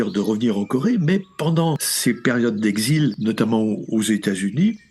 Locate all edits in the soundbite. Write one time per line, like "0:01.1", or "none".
0:01.9
0:03.2